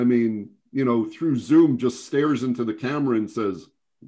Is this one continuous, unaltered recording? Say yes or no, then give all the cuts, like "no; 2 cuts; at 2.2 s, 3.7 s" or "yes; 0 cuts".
yes; 0 cuts